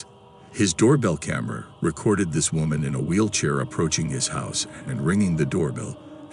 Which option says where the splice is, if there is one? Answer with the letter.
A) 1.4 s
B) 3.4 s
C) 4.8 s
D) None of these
D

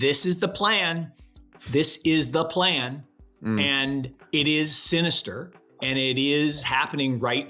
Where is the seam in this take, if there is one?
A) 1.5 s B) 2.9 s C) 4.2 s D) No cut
C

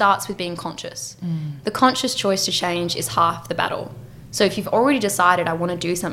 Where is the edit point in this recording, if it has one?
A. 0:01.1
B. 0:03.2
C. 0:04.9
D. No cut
D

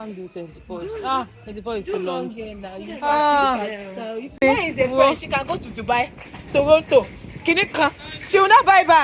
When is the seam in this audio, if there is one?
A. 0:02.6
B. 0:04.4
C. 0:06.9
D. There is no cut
B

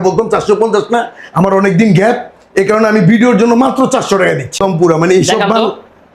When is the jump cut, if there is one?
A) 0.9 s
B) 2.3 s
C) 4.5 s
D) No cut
C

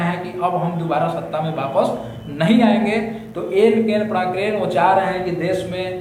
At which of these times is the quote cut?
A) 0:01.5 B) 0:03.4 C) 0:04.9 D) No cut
D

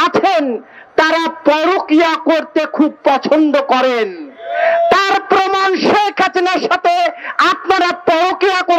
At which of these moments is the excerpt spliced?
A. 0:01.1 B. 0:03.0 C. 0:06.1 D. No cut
D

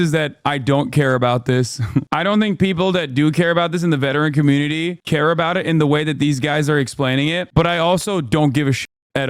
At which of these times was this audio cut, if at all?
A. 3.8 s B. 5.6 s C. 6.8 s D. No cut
D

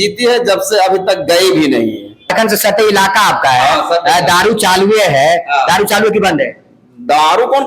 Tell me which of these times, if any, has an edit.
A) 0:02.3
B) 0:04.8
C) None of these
A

